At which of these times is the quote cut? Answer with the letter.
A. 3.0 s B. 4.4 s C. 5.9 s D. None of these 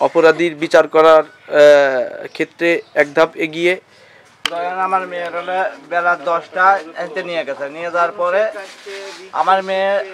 B